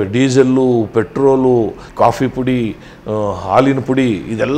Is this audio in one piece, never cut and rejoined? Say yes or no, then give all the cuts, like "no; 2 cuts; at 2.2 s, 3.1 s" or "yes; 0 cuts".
no; 1 cut; at 1.8 s